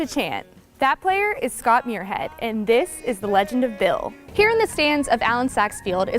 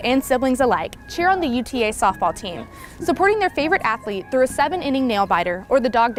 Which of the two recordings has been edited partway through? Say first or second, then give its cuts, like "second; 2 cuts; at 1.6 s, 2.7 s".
first; 1 cut; at 4.2 s